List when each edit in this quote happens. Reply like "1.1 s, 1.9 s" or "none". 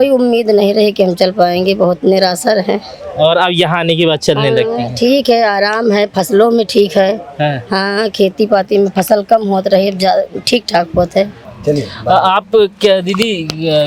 11.5 s